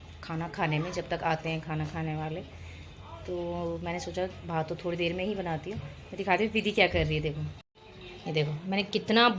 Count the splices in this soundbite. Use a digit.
0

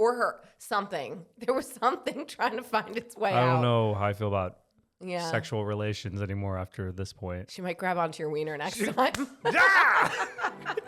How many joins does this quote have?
1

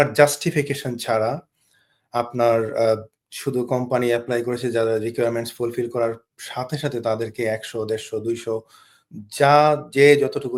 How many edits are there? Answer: 0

